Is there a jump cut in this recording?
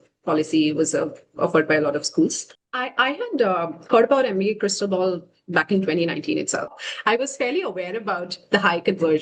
yes; 2 cuts; at 2.5 s, 6.7 s

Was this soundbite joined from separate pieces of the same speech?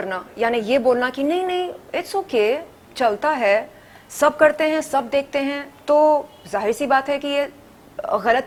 no; 0 cuts

